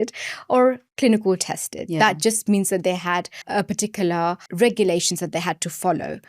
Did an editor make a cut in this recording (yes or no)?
yes